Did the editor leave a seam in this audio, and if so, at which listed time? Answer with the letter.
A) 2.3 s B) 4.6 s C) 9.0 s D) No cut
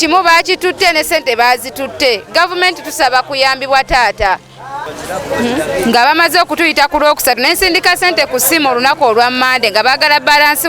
D